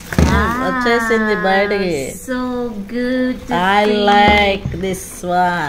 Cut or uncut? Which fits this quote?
uncut